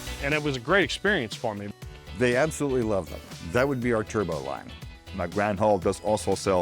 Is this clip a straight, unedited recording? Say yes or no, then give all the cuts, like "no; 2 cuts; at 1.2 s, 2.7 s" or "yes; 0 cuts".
no; 2 cuts; at 1.6 s, 5.0 s